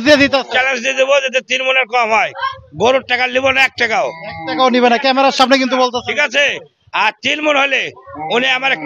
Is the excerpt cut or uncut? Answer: uncut